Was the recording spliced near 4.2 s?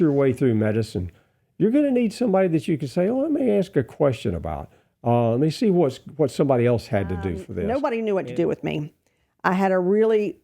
no; 1 cut; at 7.5 s

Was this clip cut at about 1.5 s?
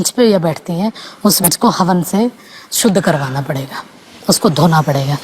yes; 1 cut; at 1.5 s

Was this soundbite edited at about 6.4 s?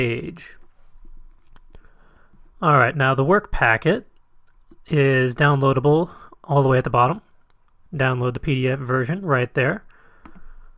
yes; 1 cut; at 6.4 s

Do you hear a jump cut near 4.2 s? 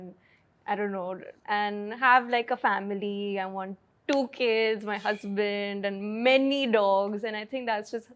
no; 1 cut; at 1.3 s

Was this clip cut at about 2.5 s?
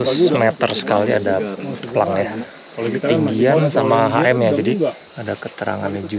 yes; 2 cuts; at 2.5 s, 5.1 s

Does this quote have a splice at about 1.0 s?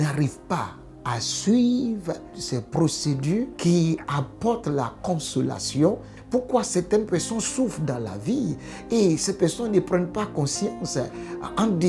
no; 3 cuts; at 2.4 s, 3.5 s, 6.1 s

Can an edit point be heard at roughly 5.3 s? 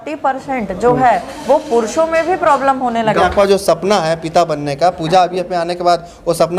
no; 1 cut; at 3.2 s

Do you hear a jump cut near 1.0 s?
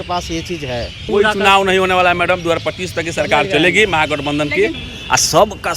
yes; 2 cuts; at 1.0 s, 4.9 s

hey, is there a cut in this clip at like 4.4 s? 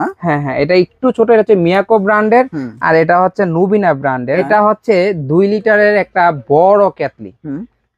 yes; 1 cut; at 4.4 s

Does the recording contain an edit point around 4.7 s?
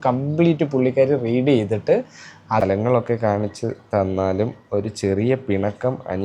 no; 1 cut; at 2.6 s

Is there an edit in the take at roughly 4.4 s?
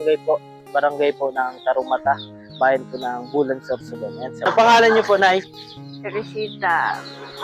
yes; 1 cut; at 4.4 s

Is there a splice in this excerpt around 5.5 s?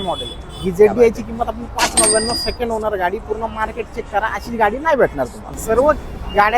yes; 1 cut; at 5.5 s

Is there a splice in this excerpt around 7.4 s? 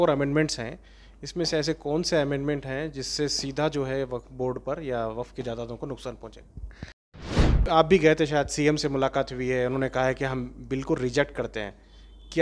yes; 1 cut; at 7.4 s

